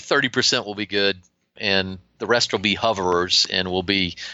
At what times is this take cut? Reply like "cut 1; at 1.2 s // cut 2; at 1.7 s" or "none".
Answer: cut 1; at 1.6 s